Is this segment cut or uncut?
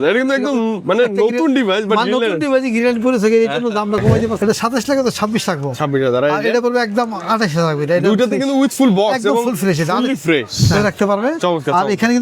cut